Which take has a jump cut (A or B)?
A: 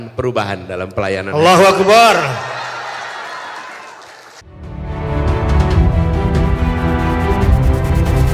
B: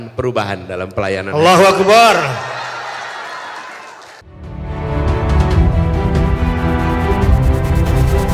B